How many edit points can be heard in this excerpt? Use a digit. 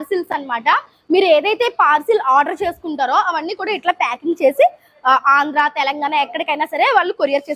0